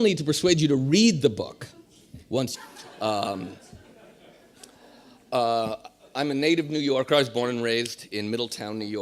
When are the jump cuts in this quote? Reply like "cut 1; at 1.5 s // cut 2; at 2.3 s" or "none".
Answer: none

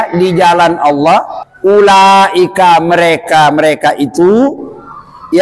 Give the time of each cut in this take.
cut 1; at 1.4 s

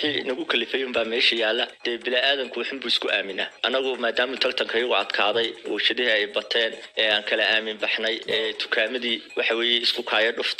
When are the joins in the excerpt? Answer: cut 1; at 1.8 s

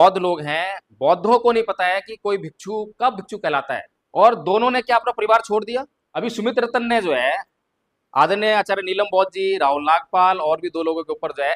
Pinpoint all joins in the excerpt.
cut 1; at 4.0 s // cut 2; at 6.0 s

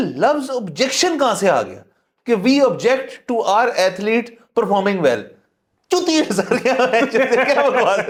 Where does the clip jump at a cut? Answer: none

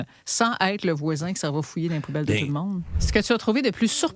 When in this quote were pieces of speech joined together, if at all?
cut 1; at 2.9 s

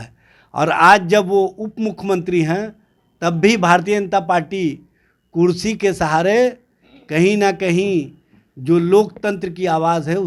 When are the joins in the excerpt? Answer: none

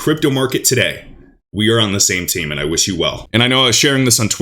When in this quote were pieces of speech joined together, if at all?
cut 1; at 3.2 s

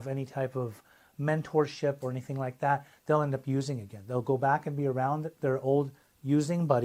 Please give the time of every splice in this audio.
none

